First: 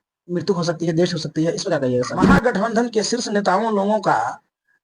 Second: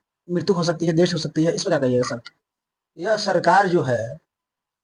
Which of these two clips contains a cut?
first; 1 cut; at 2.1 s

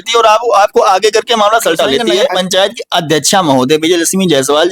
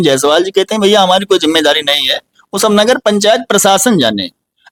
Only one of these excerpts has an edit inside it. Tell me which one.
first; 1 cut; at 2.4 s

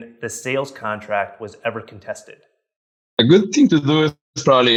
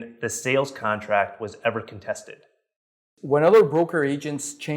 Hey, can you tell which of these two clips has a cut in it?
second; 1 cut; at 3.0 s

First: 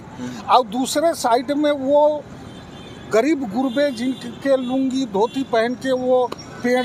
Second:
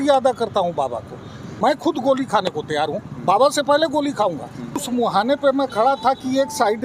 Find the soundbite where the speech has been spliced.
second; 2 cuts; at 1.5 s, 4.8 s

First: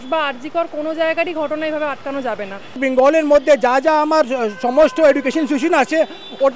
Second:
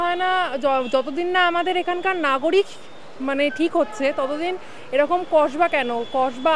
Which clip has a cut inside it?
first; 1 cut; at 2.8 s

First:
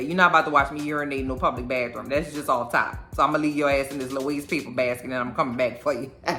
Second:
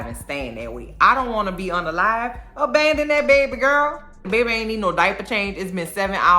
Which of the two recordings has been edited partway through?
second; 1 cut; at 4.3 s

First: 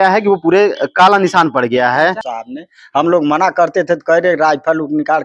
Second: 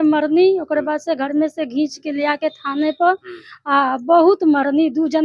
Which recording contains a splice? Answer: first; 1 cut; at 2.2 s

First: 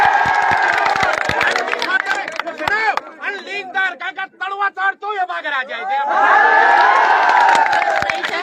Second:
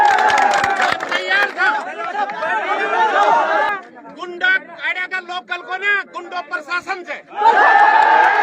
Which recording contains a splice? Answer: second; 1 cut; at 3.7 s

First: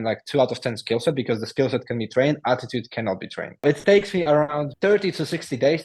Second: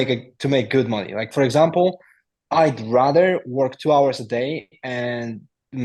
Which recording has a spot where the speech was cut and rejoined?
first; 2 cuts; at 3.6 s, 4.7 s

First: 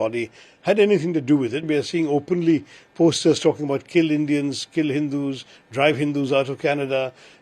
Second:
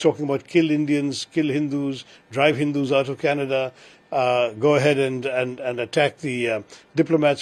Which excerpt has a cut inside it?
first; 1 cut; at 1.6 s

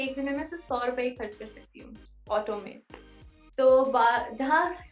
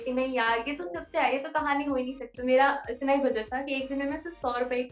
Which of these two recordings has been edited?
second; 1 cut; at 2.3 s

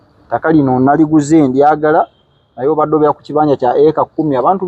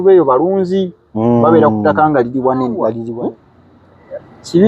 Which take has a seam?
second; 1 cut; at 3.0 s

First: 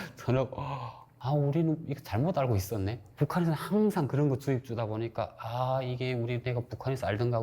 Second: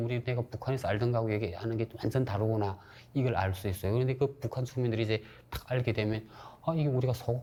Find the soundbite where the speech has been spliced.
first; 2 cuts; at 1.1 s, 2.1 s

